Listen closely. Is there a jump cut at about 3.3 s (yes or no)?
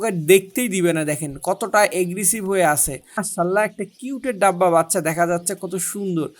yes